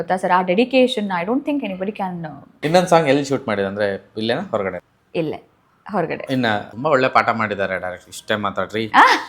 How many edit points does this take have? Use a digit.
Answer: 3